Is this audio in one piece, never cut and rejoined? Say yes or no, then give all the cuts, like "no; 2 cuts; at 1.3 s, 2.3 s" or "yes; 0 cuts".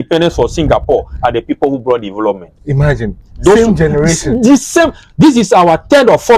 yes; 0 cuts